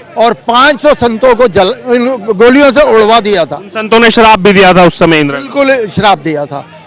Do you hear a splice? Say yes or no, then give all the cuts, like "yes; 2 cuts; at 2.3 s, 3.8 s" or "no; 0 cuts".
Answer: no; 0 cuts